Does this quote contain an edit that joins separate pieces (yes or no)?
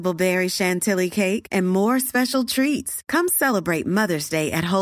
no